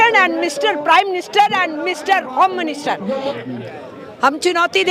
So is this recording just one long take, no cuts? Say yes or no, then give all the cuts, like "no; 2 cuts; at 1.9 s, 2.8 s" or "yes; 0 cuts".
no; 1 cut; at 3.3 s